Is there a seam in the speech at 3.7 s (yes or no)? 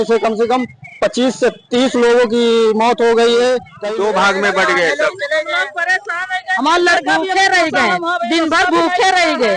yes